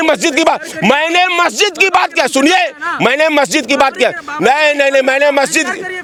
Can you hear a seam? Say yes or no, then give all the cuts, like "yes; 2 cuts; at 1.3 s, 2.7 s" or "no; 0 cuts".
no; 0 cuts